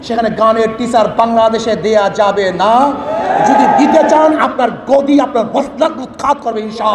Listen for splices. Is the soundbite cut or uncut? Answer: uncut